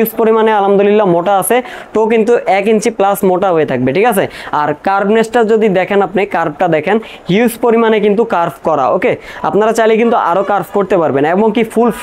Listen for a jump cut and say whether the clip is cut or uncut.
uncut